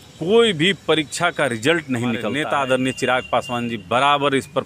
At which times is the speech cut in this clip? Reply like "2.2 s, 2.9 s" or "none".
2.3 s